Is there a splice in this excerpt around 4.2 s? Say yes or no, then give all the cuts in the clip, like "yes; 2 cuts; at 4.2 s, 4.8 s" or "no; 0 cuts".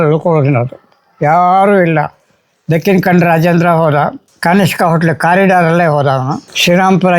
yes; 1 cut; at 4.2 s